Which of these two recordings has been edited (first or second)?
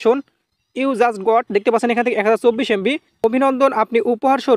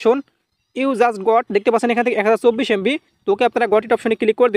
first